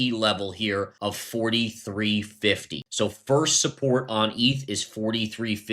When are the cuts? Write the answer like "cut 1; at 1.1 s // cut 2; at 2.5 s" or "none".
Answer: cut 1; at 0.9 s // cut 2; at 2.8 s